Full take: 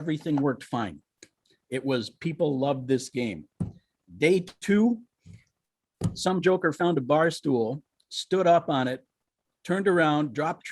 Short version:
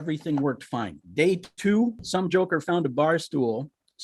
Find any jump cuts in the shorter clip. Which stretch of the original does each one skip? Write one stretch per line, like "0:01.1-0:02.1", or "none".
0:01.0-0:04.0
0:05.1-0:06.1